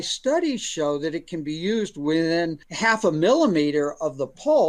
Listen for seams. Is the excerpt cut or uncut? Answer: cut